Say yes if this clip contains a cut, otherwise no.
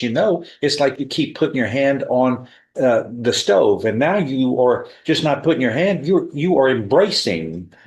no